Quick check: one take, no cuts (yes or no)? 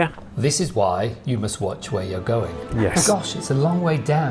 no